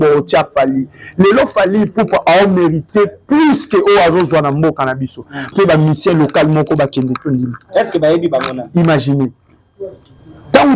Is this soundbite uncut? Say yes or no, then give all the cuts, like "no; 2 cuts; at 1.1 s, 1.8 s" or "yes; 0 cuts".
no; 1 cut; at 5.5 s